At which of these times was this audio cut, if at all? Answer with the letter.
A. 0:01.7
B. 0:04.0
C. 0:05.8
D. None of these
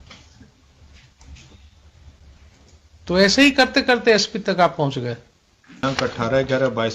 C